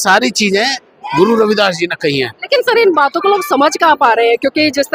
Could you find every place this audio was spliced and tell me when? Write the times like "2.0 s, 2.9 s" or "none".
none